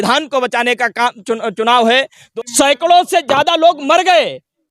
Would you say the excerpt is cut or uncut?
cut